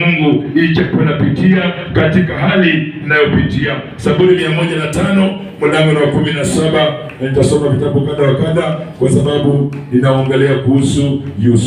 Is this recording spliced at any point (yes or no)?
no